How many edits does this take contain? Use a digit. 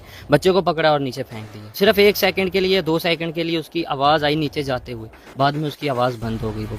1